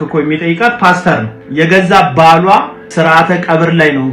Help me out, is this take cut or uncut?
cut